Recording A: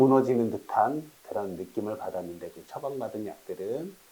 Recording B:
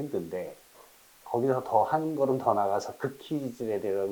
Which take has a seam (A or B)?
A